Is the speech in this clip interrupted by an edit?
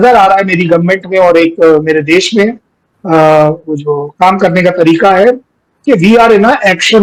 no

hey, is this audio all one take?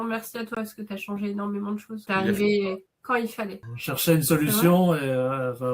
no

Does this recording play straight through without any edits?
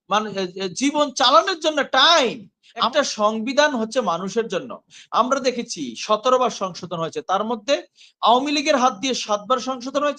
no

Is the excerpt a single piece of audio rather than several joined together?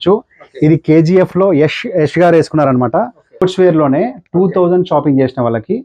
no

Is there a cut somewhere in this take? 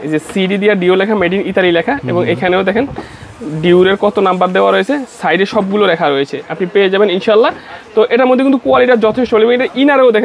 no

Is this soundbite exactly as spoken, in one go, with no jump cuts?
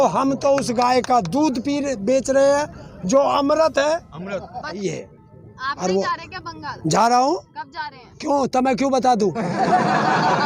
no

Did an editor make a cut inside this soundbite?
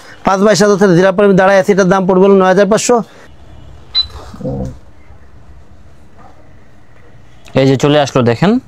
yes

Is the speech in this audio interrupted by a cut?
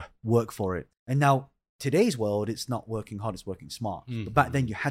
yes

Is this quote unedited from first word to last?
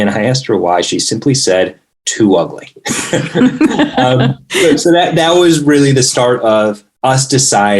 no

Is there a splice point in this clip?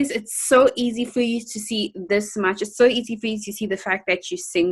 no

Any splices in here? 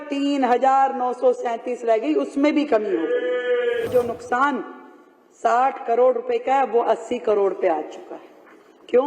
yes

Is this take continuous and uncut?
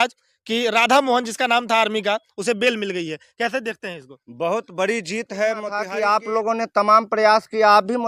no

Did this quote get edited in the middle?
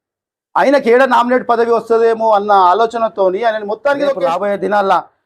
yes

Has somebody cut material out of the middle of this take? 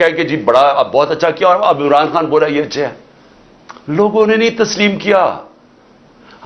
no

